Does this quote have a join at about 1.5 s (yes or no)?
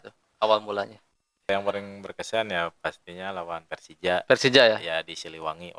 yes